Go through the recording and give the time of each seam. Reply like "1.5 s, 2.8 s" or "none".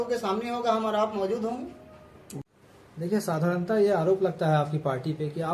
2.4 s